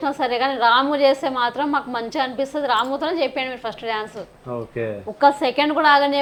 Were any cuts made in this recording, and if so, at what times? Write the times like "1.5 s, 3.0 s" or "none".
none